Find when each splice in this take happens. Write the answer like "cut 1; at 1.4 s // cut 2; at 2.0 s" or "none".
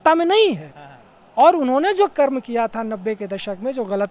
none